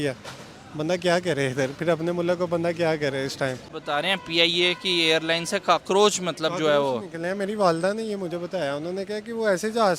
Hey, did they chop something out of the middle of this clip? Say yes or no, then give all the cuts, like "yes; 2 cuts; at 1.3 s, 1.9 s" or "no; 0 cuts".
yes; 1 cut; at 3.7 s